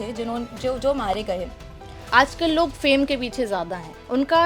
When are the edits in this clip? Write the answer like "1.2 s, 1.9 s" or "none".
1.9 s